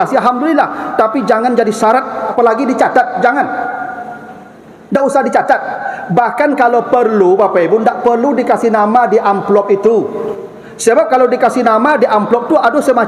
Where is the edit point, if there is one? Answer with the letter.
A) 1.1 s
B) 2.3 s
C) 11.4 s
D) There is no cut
B